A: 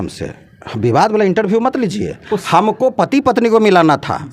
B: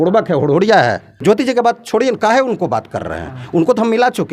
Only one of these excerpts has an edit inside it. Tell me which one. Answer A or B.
B